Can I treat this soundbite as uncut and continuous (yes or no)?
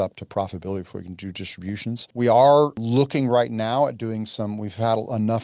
no